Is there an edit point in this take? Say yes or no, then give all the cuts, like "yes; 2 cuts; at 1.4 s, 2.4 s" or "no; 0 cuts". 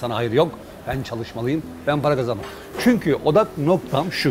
no; 0 cuts